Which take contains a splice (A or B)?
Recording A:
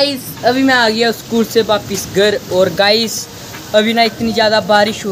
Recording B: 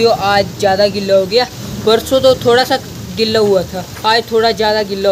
B